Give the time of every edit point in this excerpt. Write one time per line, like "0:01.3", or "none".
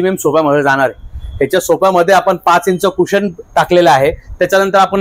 none